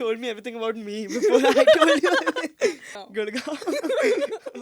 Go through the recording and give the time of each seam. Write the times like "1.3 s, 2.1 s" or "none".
2.9 s